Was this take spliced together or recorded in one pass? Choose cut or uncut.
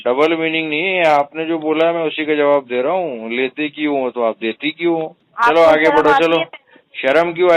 cut